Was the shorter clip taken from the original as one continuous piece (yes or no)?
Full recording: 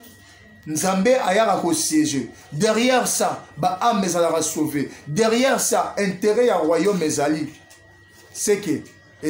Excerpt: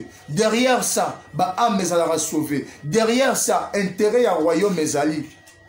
yes